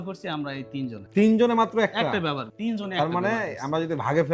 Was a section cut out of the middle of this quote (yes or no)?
no